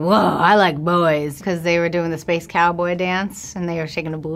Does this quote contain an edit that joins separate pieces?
yes; 1 cut; at 1.4 s

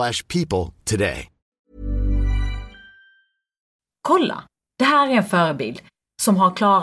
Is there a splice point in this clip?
yes; 1 cut; at 3.6 s

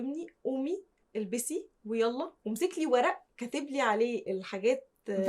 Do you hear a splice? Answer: yes; 1 cut; at 4.2 s

